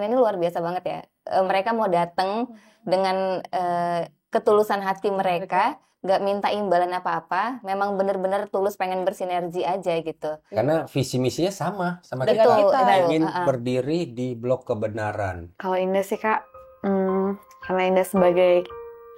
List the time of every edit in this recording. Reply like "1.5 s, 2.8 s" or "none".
15.4 s